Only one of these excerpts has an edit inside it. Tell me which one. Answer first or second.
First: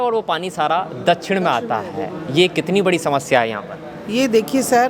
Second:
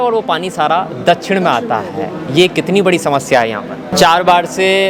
second